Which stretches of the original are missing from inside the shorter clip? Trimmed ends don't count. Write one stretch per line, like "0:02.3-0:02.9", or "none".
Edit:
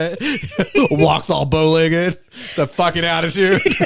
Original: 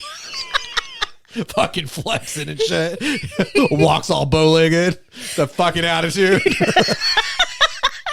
none